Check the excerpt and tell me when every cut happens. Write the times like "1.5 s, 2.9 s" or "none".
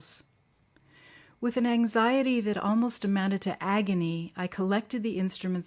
none